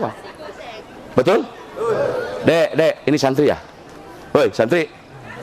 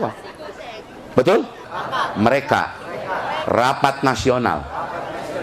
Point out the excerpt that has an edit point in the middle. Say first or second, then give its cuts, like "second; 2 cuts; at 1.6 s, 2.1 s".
second; 1 cut; at 1.6 s